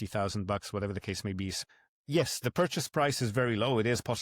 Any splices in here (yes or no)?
yes